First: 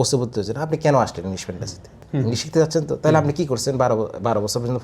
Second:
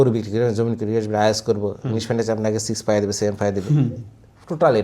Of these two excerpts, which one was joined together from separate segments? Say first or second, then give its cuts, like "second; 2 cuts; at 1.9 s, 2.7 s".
first; 1 cut; at 2.0 s